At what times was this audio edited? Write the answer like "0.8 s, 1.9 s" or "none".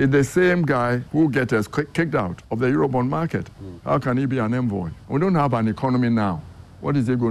1.0 s, 2.4 s, 5.0 s